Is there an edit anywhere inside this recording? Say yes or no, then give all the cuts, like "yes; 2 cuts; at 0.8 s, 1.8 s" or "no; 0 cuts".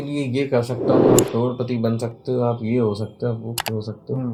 no; 0 cuts